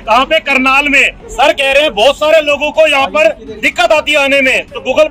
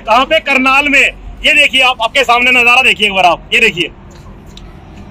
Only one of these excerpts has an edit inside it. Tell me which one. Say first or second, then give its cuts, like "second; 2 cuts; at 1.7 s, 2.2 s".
first; 1 cut; at 1.2 s